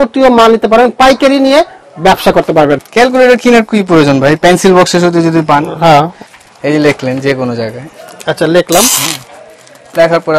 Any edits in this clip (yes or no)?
yes